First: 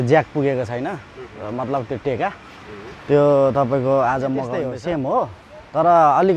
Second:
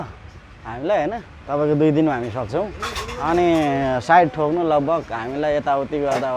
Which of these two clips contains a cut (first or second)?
first